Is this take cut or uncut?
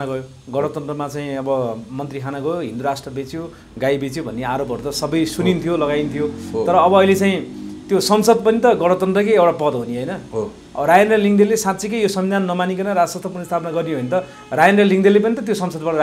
uncut